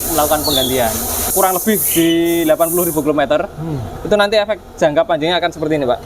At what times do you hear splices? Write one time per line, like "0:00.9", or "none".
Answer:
0:01.2